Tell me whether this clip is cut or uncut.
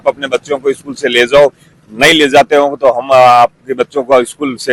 uncut